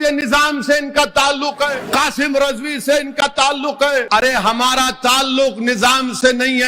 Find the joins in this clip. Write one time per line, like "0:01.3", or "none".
0:01.8
0:04.1

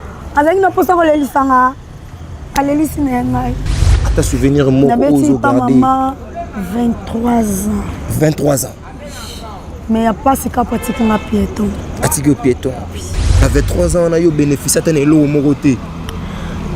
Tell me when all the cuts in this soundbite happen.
0:03.9
0:13.3

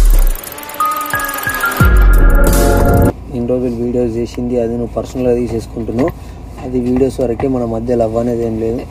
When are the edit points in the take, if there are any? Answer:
0:03.1

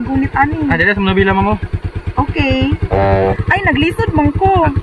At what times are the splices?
none

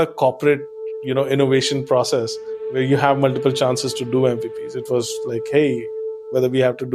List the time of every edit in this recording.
0:02.7

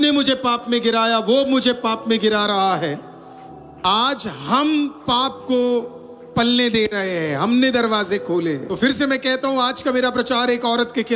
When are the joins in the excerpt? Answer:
0:08.7

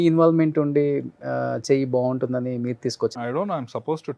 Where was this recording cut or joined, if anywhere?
0:03.2

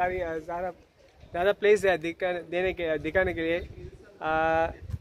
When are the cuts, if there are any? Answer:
0:01.6

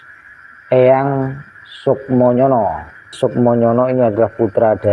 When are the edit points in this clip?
0:03.1

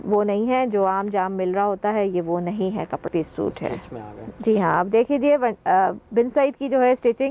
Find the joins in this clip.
0:03.1

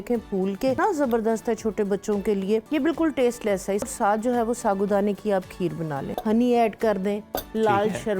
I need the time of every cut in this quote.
0:00.8
0:02.7
0:03.9
0:06.0

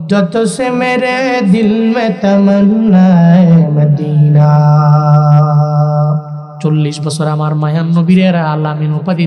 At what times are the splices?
0:06.4

